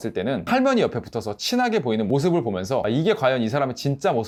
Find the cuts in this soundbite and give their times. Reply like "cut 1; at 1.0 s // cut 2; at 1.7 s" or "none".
none